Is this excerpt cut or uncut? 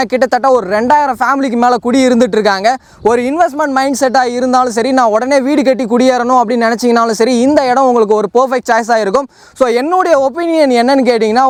uncut